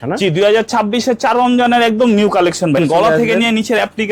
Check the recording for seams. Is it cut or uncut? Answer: cut